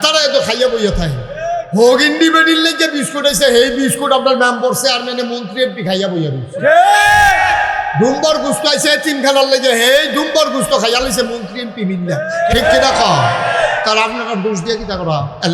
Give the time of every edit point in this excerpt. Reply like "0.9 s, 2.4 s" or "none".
none